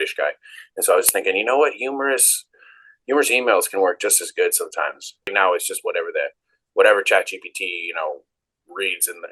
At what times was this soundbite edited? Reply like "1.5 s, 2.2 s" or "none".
5.3 s